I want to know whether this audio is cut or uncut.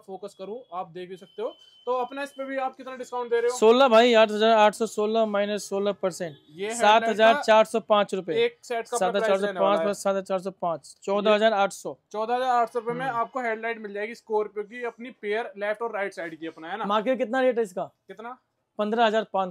uncut